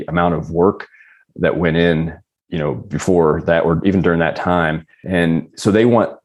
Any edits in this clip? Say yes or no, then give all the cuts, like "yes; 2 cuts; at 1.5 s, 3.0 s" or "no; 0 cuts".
no; 0 cuts